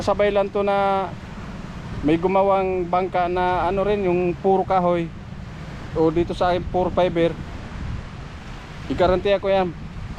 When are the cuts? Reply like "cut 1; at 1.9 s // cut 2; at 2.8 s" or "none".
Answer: none